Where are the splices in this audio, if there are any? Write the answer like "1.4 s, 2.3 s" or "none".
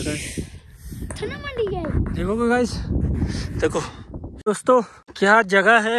4.3 s, 5.0 s